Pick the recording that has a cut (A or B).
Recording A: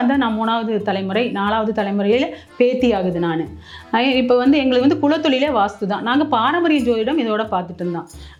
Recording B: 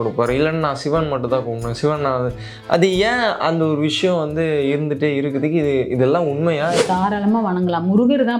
B